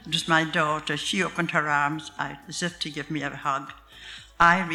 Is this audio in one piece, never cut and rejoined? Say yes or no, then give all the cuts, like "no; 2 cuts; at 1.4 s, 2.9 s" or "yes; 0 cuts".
yes; 0 cuts